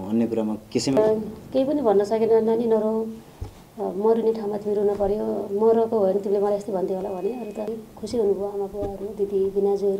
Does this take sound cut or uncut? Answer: cut